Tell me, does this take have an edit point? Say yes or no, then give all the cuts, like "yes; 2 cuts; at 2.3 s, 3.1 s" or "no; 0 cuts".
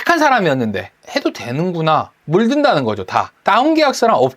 yes; 2 cuts; at 0.9 s, 2.2 s